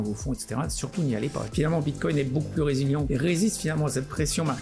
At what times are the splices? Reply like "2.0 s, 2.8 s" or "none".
1.5 s, 3.1 s